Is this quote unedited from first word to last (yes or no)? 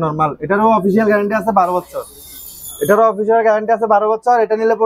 yes